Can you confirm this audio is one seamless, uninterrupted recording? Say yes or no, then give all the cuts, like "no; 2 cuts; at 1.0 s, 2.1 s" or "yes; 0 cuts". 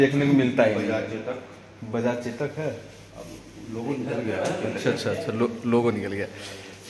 yes; 0 cuts